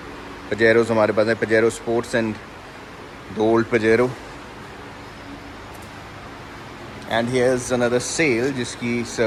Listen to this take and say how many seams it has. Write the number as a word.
zero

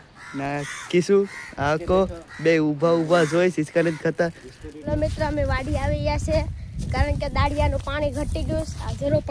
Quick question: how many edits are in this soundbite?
one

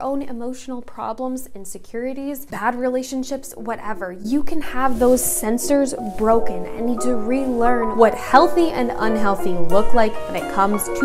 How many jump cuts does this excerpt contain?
two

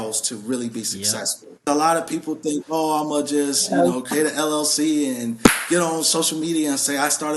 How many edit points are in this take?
one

